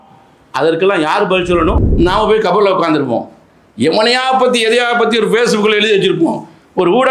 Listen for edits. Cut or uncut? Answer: cut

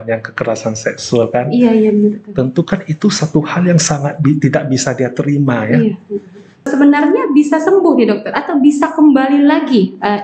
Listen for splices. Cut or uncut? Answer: cut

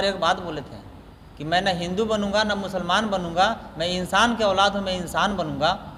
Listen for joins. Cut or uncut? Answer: uncut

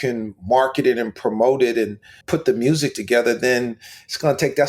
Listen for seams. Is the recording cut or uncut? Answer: cut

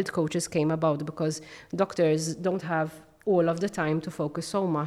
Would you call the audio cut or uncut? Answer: uncut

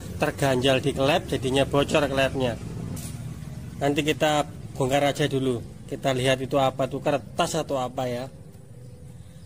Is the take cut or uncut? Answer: cut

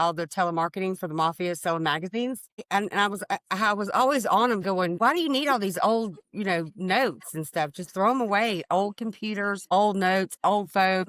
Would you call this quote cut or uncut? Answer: cut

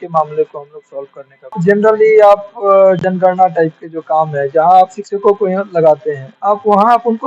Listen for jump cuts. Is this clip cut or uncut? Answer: cut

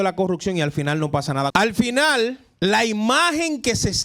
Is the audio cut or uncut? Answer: cut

